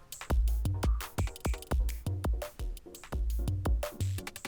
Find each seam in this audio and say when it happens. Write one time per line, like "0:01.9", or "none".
none